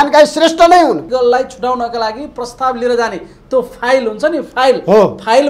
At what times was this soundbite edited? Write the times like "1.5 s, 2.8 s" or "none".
1.0 s